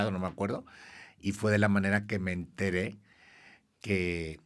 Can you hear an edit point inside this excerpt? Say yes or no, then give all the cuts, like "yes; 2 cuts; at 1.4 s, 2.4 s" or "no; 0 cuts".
no; 0 cuts